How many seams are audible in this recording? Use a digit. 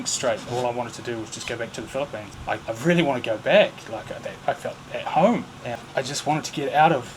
2